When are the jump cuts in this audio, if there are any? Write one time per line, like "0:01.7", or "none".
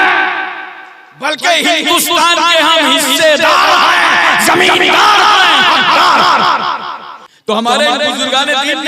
0:07.6

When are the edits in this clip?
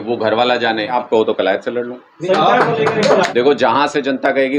0:00.9
0:03.3

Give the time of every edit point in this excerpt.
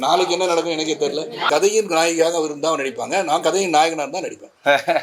0:01.4

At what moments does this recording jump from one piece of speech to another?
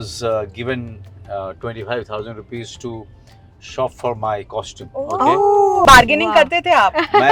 0:05.9

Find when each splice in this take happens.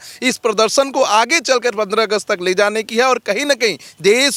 none

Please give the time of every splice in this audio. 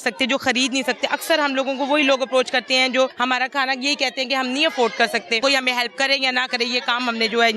0:03.1
0:05.4

